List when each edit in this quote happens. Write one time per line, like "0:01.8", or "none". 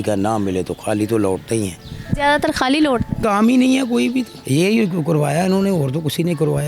0:03.2
0:04.4